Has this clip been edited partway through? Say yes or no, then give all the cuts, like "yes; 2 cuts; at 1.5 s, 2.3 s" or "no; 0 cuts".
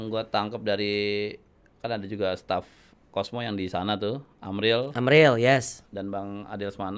no; 0 cuts